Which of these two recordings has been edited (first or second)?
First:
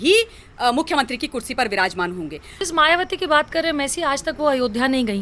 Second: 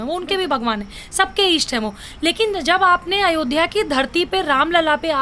first